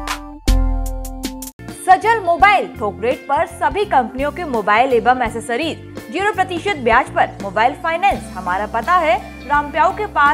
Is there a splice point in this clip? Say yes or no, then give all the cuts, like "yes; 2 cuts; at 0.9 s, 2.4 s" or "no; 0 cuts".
no; 0 cuts